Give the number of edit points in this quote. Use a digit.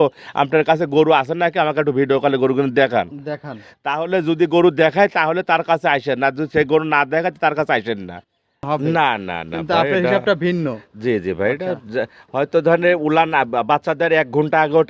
1